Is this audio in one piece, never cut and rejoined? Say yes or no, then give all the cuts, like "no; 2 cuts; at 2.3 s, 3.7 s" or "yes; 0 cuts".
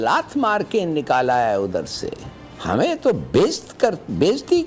yes; 0 cuts